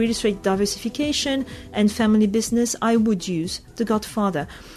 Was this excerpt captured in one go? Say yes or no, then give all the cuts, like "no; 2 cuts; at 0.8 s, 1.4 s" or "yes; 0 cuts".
yes; 0 cuts